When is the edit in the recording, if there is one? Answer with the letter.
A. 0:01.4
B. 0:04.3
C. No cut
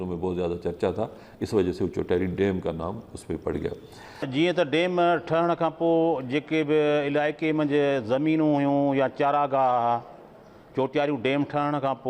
B